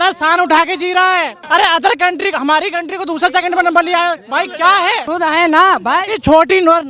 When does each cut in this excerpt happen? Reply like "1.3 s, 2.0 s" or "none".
1.4 s, 5.0 s